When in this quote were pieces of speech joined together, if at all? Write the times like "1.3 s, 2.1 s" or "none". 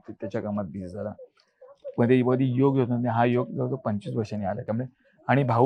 none

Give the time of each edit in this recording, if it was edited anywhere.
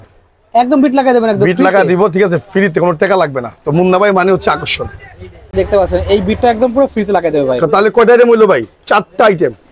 none

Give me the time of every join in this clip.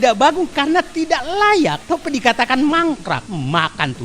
1.8 s, 3.3 s

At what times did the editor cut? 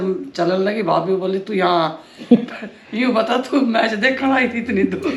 none

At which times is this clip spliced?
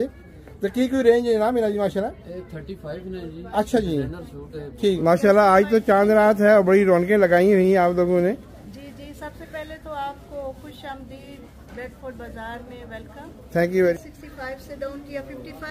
5.0 s, 13.9 s

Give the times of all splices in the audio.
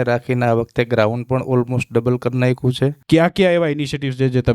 3.0 s

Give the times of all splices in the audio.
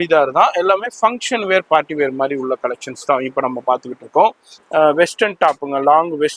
4.5 s

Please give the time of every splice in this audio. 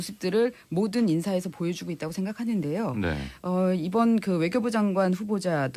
3.1 s

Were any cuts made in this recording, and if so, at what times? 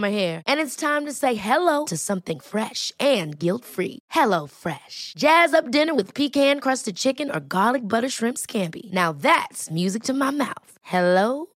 none

